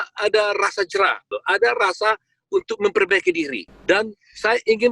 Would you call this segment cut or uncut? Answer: cut